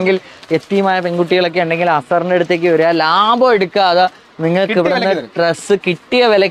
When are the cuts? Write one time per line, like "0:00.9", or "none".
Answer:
none